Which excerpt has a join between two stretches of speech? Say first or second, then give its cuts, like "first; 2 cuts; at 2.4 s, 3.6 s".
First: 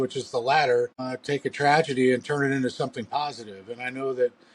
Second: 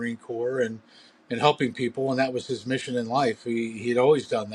first; 1 cut; at 1.1 s